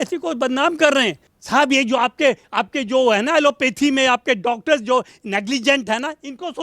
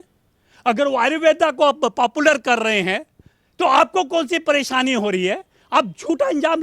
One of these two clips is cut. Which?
first; 1 cut; at 1.3 s

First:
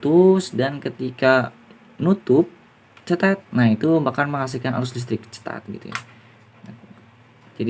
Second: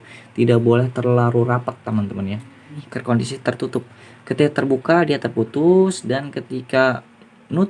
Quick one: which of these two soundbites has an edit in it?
second; 1 cut; at 2.8 s

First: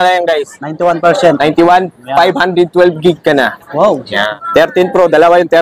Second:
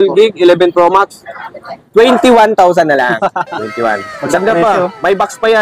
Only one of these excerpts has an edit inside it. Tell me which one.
first; 1 cut; at 4.2 s

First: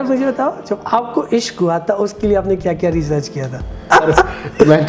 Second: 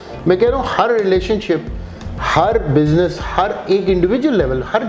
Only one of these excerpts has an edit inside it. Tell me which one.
first; 1 cut; at 3.9 s

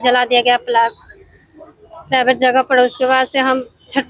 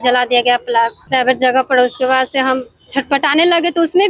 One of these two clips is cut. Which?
second; 1 cut; at 1.0 s

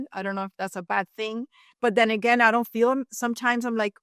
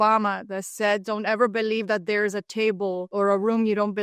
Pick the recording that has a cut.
second; 1 cut; at 3.0 s

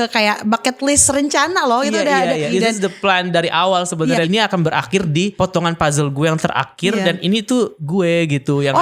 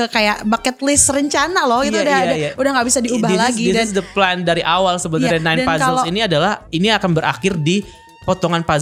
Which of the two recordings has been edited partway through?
first; 4 cuts; at 2.5 s, 4.3 s, 5.3 s, 7.8 s

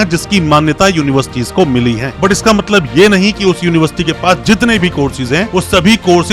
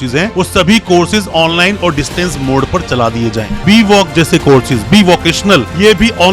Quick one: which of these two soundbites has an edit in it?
second; 1 cut; at 3.6 s

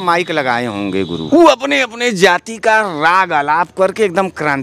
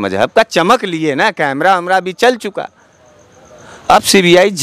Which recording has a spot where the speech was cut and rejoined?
first; 1 cut; at 1.2 s

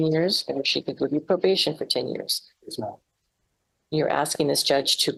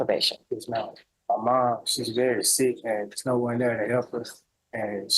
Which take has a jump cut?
second; 1 cut; at 1.1 s

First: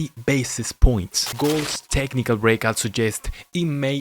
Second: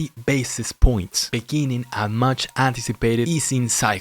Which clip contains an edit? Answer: first; 1 cut; at 1.2 s

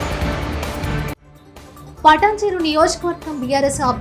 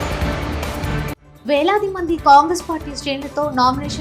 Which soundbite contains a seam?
second; 1 cut; at 1.3 s

